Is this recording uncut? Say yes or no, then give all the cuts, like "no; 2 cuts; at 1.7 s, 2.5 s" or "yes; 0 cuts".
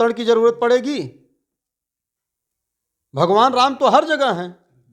yes; 0 cuts